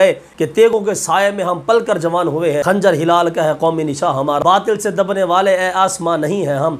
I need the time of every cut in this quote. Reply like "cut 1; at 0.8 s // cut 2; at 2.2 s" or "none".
cut 1; at 0.7 s // cut 2; at 2.6 s // cut 3; at 4.4 s